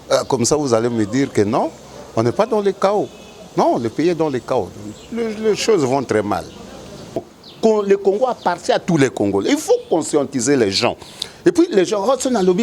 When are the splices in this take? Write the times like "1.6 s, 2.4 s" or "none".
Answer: 7.3 s